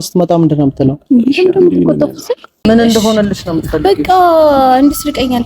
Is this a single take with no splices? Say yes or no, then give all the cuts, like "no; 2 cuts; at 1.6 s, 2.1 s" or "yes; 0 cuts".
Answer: no; 1 cut; at 2.6 s